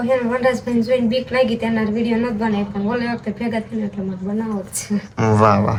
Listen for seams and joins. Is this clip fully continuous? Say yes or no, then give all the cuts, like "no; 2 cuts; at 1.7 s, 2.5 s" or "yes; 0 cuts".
yes; 0 cuts